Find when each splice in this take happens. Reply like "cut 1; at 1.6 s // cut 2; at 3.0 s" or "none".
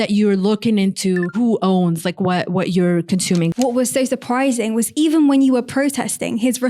cut 1; at 1.3 s // cut 2; at 3.5 s